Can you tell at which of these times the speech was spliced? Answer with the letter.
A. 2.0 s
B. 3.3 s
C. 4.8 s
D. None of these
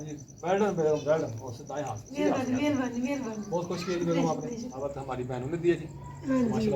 C